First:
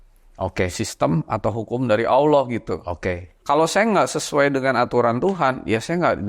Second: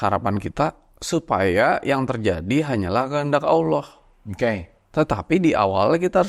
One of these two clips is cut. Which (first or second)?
first